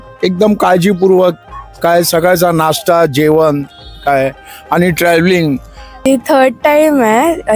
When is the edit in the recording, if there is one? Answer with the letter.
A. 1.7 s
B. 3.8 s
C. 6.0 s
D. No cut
C